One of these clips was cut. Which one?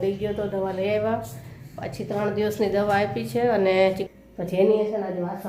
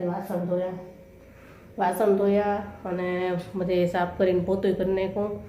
first; 1 cut; at 4.0 s

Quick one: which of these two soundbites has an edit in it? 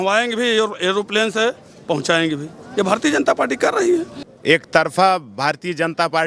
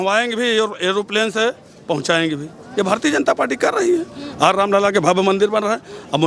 first; 1 cut; at 4.2 s

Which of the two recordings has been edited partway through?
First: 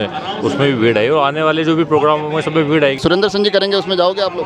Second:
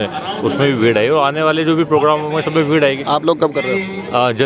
first; 1 cut; at 3.0 s

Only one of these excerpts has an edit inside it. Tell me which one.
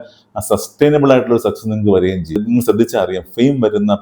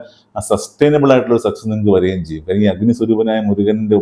first; 1 cut; at 2.4 s

